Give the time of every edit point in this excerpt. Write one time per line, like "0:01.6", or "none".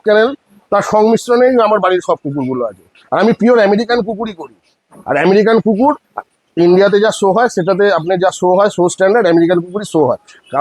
none